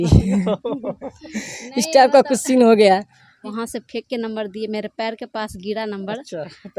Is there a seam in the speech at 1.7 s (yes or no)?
no